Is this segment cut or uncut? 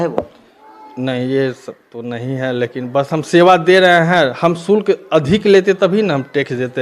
uncut